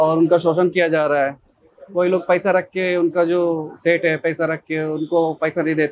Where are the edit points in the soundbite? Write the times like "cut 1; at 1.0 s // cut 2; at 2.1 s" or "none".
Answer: none

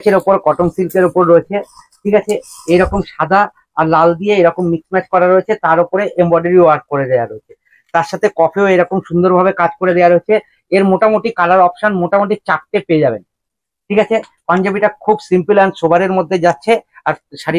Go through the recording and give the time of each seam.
none

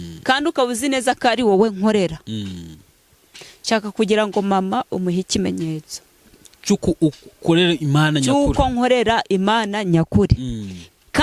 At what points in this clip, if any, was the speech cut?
none

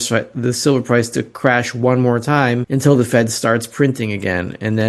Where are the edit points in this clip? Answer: cut 1; at 2.7 s

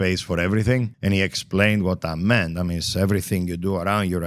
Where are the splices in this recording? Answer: cut 1; at 0.9 s

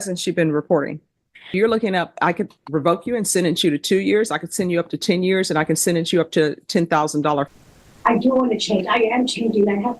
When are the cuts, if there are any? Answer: cut 1; at 1.5 s // cut 2; at 7.5 s

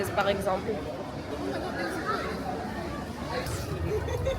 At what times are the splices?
cut 1; at 3.5 s

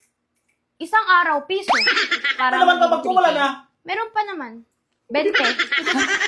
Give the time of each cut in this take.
cut 1; at 2.2 s

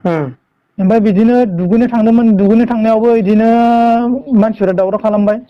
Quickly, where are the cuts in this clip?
none

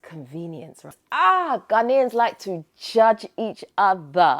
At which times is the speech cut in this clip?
cut 1; at 1.0 s

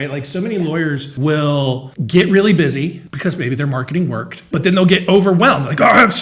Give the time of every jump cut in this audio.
cut 1; at 1.1 s // cut 2; at 1.9 s // cut 3; at 3.1 s // cut 4; at 4.3 s

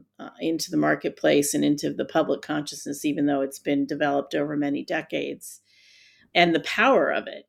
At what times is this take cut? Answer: cut 1; at 6.3 s

